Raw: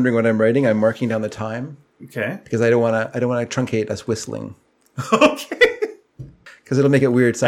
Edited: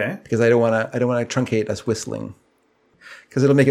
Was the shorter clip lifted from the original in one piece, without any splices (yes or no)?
no